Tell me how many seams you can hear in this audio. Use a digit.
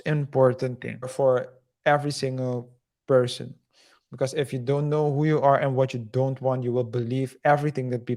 1